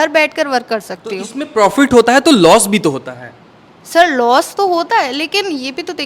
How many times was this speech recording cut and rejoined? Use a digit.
0